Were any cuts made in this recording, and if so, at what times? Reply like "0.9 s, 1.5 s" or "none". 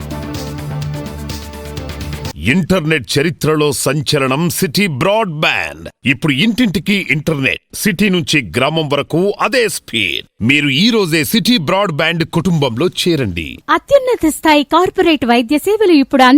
2.3 s

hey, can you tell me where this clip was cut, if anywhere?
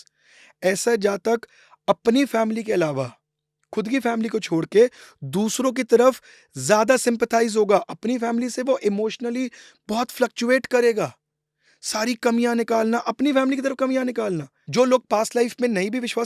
14.6 s

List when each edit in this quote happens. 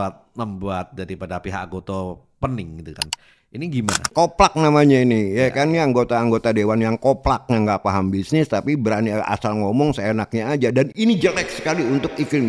4.1 s

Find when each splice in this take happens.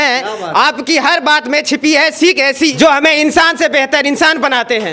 2.7 s

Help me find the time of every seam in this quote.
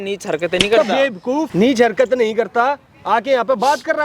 1.5 s

